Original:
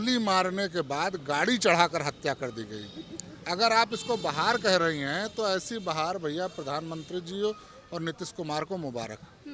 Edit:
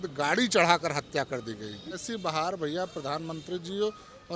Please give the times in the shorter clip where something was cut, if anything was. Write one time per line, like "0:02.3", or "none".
0:02.1